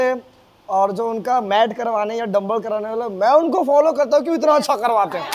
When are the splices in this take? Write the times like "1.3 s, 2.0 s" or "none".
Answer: none